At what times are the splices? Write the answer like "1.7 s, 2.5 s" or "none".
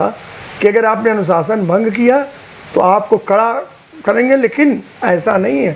none